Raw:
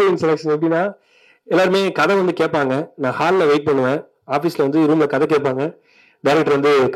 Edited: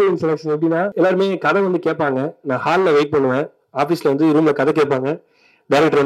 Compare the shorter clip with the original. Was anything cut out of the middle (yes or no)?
yes